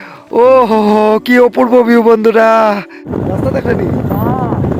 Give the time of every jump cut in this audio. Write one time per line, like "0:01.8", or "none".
0:03.1